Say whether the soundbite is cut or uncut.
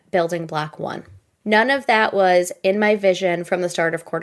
uncut